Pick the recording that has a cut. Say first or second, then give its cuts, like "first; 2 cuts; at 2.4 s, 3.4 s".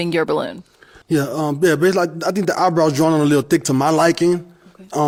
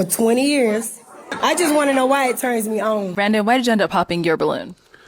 second; 2 cuts; at 1.3 s, 3.1 s